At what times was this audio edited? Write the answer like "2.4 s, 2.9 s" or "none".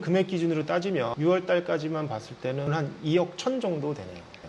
1.1 s, 2.7 s